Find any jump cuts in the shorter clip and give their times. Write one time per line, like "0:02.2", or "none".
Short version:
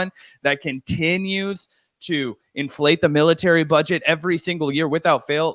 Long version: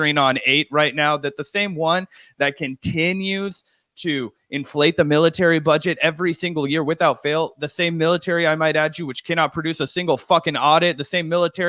none